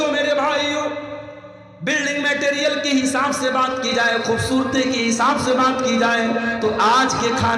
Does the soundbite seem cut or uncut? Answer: uncut